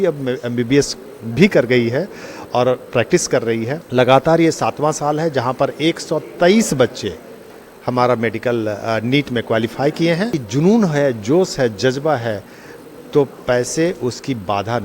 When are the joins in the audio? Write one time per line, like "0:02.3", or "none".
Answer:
0:03.8
0:10.4